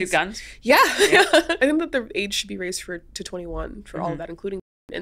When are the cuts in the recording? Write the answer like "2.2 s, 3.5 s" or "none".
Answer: 1.6 s